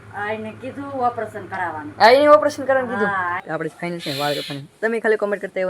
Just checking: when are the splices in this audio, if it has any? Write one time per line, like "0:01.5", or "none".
0:03.4